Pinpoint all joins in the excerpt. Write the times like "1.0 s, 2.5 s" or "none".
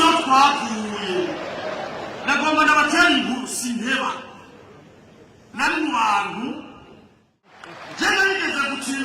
7.4 s